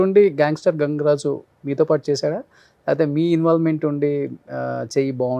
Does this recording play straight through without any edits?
yes; 0 cuts

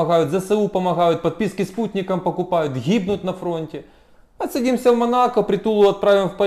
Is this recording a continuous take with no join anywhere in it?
yes; 0 cuts

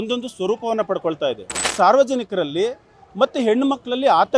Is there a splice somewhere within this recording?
yes; 1 cut; at 1.6 s

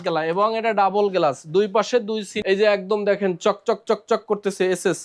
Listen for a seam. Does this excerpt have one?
yes; 1 cut; at 2.3 s

